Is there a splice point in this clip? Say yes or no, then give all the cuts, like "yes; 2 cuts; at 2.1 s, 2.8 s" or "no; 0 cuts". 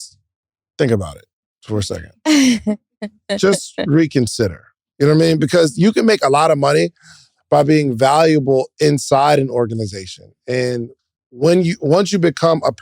yes; 1 cut; at 4.7 s